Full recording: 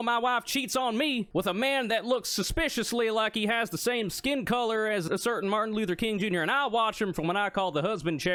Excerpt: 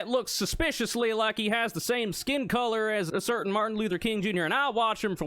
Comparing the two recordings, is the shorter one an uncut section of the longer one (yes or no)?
yes